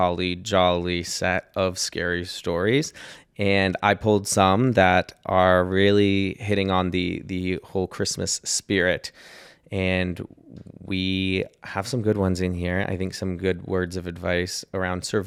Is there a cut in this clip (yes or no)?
no